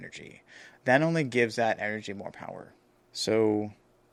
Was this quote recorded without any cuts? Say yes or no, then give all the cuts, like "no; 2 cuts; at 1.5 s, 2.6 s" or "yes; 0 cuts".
yes; 0 cuts